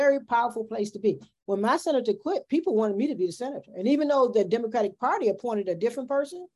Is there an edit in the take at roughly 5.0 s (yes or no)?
no